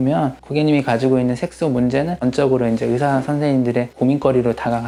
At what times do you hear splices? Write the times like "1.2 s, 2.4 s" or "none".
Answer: none